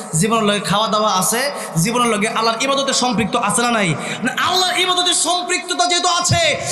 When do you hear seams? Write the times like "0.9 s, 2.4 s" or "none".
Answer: none

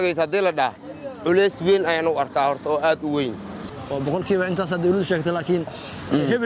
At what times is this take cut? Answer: 3.6 s

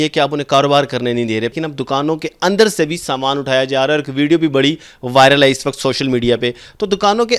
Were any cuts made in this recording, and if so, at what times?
1.5 s

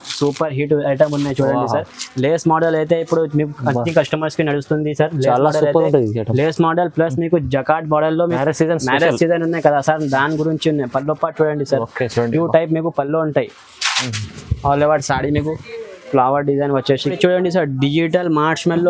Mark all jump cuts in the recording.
8.3 s, 17.1 s

